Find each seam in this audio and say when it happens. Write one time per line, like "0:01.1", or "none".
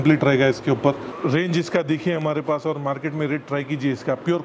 0:01.1